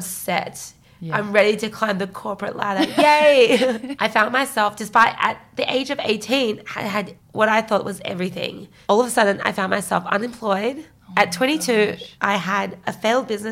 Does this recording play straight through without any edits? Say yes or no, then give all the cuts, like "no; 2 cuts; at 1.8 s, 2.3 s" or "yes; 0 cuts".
no; 3 cuts; at 3.9 s, 8.7 s, 12.1 s